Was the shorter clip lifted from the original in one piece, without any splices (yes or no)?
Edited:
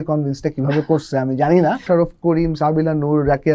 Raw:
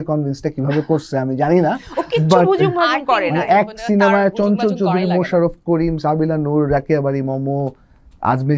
no